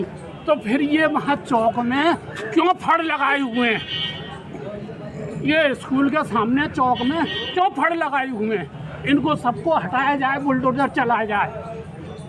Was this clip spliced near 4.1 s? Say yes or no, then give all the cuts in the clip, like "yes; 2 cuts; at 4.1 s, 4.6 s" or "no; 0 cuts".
no; 0 cuts